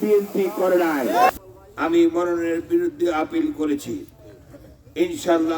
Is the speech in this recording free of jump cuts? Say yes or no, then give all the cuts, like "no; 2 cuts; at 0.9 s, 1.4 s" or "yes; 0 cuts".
no; 1 cut; at 1.4 s